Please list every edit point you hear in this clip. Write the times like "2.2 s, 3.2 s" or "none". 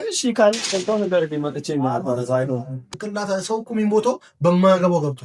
2.9 s